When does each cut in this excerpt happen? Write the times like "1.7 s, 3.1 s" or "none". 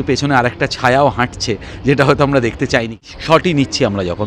2.9 s